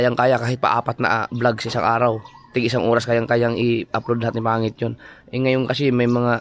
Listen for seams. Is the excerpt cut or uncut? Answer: uncut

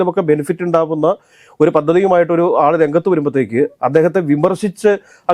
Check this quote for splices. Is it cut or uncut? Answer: uncut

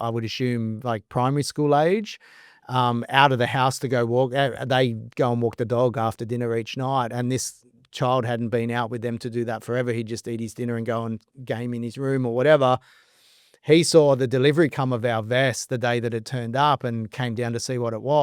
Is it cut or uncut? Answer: uncut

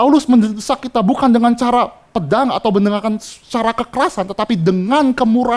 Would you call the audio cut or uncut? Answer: uncut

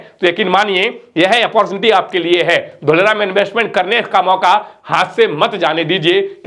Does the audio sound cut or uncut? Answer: uncut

